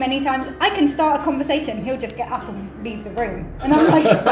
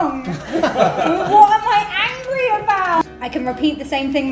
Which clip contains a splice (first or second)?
second